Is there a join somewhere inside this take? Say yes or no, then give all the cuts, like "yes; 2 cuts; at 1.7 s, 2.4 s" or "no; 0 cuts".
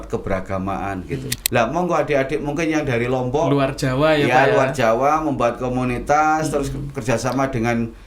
yes; 1 cut; at 1.3 s